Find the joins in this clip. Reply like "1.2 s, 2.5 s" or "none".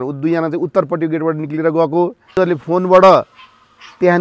2.2 s